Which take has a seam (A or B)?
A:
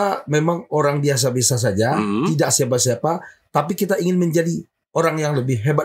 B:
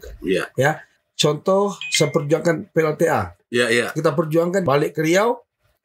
B